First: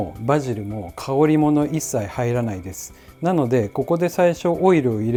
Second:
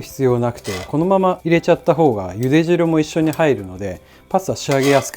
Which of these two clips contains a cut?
second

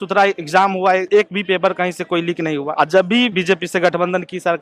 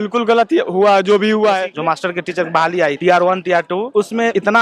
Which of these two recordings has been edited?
second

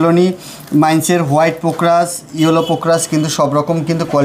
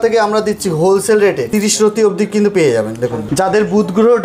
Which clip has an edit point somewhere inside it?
second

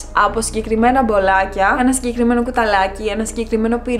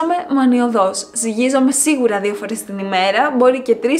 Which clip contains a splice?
first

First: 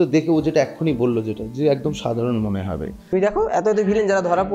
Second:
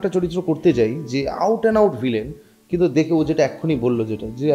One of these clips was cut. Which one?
first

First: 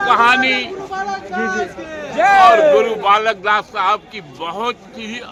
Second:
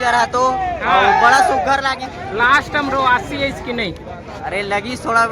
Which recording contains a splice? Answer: second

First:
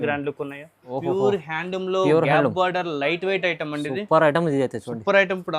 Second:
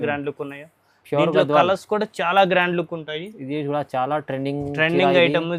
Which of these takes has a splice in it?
first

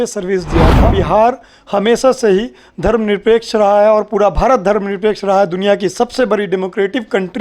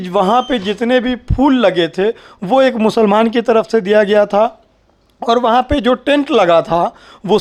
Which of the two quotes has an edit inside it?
first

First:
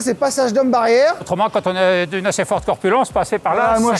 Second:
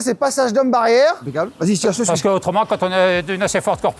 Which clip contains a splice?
first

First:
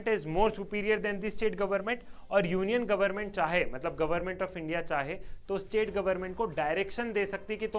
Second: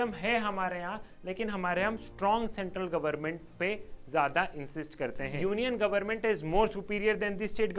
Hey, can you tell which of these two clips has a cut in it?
second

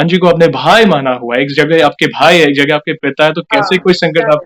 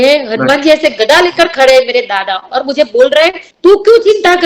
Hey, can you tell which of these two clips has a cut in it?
second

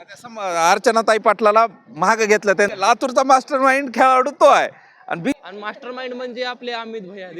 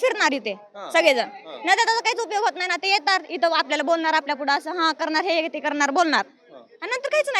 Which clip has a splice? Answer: first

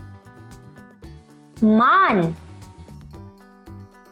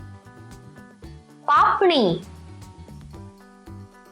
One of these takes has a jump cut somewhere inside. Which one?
second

